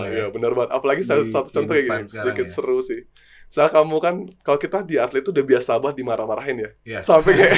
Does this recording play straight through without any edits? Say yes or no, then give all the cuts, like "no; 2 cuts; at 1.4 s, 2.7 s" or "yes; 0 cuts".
yes; 0 cuts